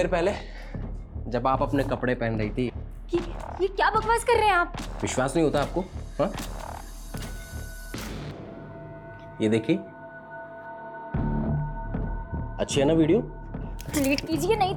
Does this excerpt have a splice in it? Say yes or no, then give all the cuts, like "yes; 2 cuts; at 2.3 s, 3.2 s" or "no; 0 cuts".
no; 0 cuts